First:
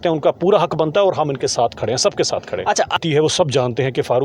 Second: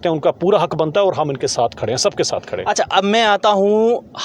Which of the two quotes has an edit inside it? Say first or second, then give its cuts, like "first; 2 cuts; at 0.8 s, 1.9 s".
first; 1 cut; at 2.9 s